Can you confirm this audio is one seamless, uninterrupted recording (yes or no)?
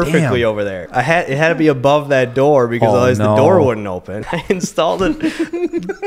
no